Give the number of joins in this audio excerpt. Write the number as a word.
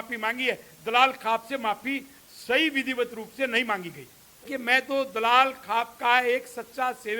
one